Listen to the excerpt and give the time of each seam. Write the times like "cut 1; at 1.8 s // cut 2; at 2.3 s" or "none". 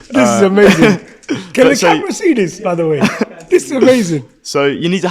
none

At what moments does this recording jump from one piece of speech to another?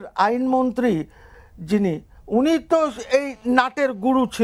none

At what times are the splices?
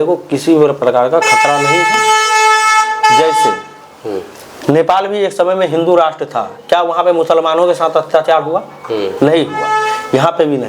none

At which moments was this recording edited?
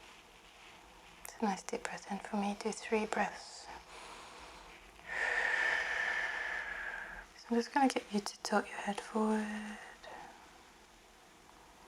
cut 1; at 7.3 s

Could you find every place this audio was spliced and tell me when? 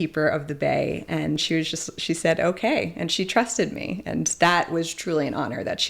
cut 1; at 1.4 s

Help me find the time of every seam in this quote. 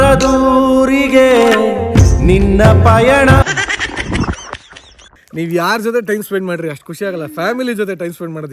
cut 1; at 5.2 s

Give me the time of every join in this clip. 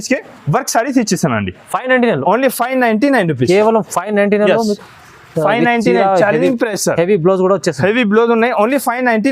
none

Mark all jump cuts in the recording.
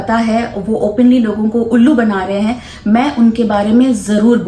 none

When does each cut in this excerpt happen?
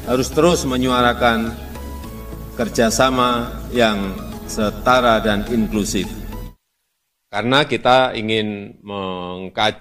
cut 1; at 6.5 s

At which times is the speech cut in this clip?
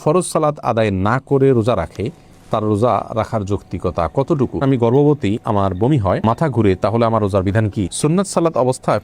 cut 1; at 4.6 s // cut 2; at 7.9 s

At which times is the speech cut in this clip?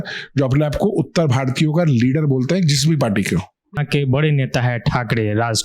cut 1; at 3.7 s

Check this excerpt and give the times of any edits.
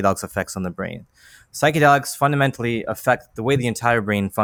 none

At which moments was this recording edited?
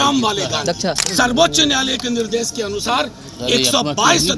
cut 1; at 1.0 s

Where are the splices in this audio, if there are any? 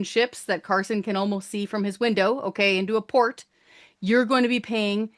none

